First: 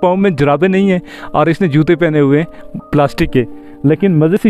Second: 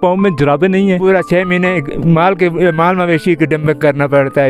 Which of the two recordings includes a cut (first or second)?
second